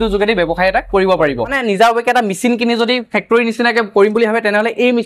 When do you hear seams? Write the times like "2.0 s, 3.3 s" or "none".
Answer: 1.6 s